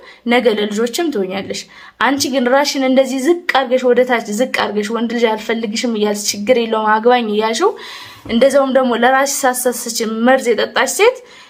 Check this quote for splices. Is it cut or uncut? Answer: uncut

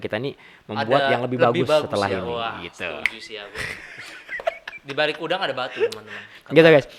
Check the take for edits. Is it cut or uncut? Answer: uncut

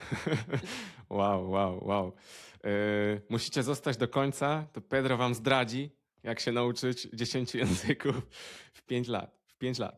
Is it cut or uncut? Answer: uncut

